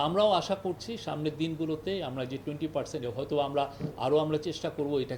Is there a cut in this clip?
no; 0 cuts

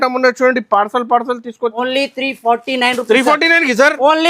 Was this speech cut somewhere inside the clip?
yes; 1 cut; at 1.7 s

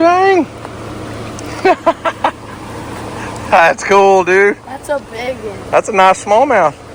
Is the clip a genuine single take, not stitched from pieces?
yes; 0 cuts

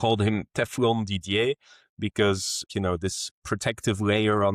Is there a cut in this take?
yes; 1 cut; at 2.7 s

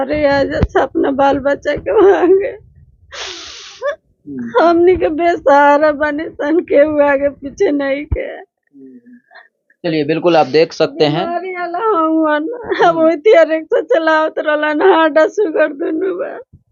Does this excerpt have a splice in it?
no; 0 cuts

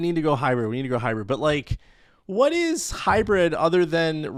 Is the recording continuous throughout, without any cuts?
yes; 0 cuts

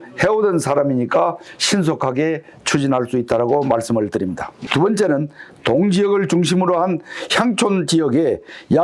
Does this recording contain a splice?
yes; 1 cut; at 4.5 s

